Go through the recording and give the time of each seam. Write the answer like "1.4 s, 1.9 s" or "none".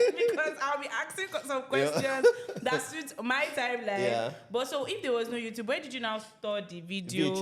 none